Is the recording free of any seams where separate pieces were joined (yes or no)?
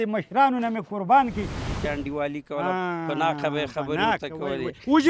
no